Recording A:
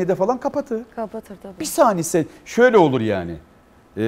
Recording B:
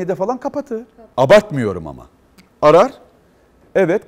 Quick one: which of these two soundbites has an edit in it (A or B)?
B